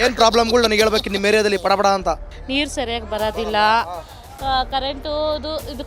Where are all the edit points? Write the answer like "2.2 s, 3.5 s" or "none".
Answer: 2.3 s

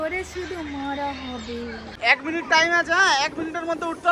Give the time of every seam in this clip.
1.9 s

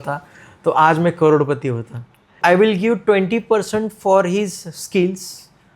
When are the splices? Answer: 2.4 s

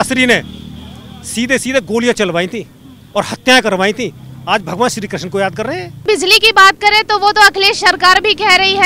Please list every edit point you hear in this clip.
6.0 s

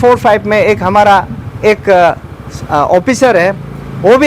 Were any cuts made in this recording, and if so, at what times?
none

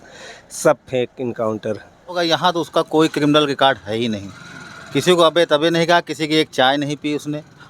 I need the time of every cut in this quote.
2.2 s

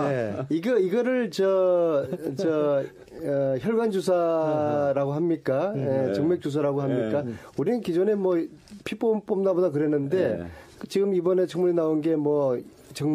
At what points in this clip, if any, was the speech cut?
none

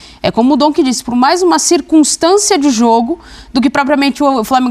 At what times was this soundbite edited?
none

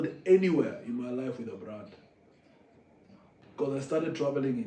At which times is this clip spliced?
3.4 s

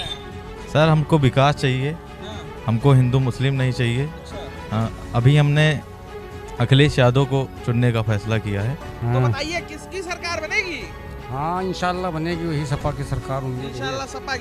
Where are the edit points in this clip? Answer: 8.9 s

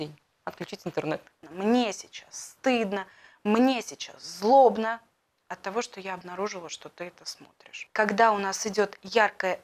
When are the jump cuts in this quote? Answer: 1.4 s, 7.8 s

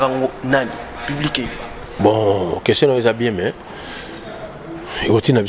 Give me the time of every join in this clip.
1.9 s

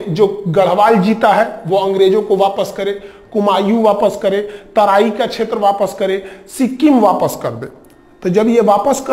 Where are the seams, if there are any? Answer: none

